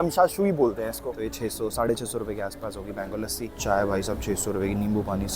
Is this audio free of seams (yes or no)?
no